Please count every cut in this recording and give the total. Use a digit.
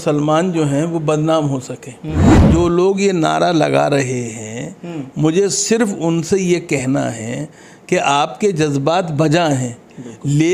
1